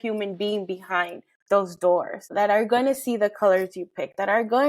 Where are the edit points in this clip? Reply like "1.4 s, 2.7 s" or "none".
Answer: 2.3 s